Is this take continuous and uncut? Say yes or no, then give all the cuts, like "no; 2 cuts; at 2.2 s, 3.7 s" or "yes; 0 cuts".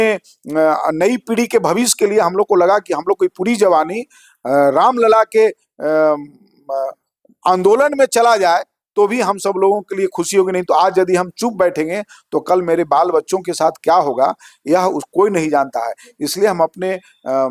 yes; 0 cuts